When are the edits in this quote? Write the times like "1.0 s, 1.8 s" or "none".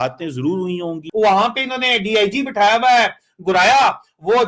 1.0 s